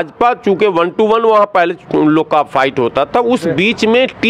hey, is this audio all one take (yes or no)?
yes